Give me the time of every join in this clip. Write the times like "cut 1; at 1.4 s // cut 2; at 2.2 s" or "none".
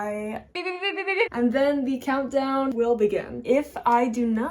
cut 1; at 0.8 s // cut 2; at 2.9 s